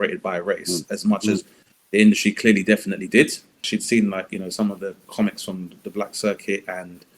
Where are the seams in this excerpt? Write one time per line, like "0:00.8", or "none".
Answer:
0:03.6